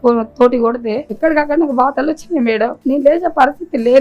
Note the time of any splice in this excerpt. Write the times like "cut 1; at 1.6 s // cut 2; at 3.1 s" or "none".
cut 1; at 1.1 s // cut 2; at 2.8 s